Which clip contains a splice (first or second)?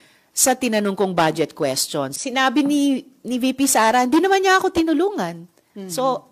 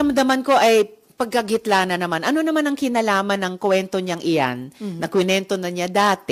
first